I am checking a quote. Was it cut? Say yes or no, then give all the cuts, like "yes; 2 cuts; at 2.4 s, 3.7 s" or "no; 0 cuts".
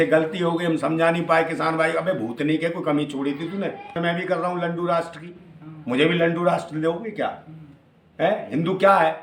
yes; 1 cut; at 4.0 s